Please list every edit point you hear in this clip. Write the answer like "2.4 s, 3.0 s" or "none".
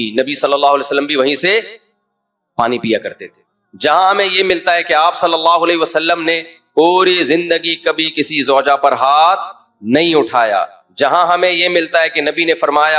none